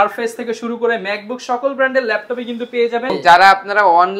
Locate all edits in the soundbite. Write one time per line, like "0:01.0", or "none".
0:03.1